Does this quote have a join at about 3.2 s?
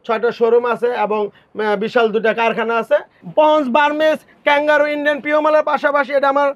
yes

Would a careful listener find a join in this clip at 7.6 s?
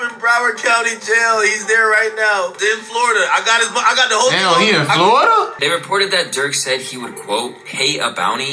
no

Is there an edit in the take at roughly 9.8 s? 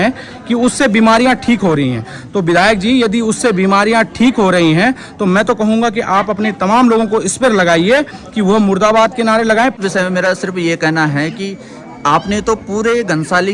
yes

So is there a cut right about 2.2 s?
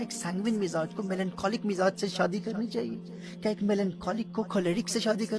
no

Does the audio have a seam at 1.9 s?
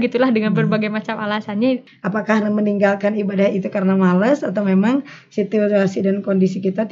yes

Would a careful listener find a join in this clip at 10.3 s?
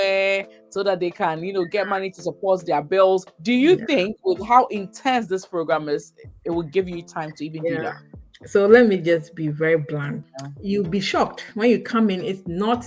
yes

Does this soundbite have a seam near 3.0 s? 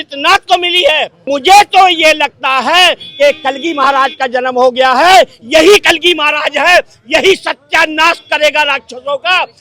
no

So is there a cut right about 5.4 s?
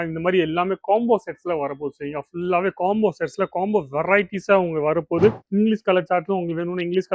yes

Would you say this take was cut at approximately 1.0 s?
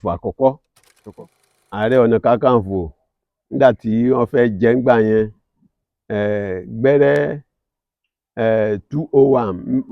yes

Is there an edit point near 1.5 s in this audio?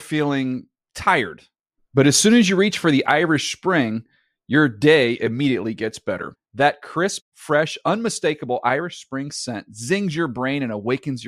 no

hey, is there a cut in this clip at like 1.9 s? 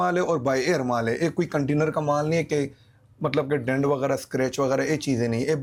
no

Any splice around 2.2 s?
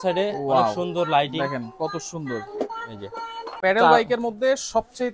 no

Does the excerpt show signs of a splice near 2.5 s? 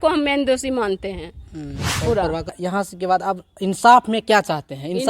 yes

